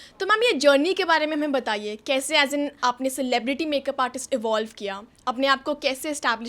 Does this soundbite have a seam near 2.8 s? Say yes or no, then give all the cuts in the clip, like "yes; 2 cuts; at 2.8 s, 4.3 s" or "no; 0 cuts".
yes; 1 cut; at 2.8 s